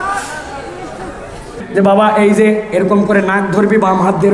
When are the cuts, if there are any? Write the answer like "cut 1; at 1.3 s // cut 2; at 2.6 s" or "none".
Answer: cut 1; at 1.5 s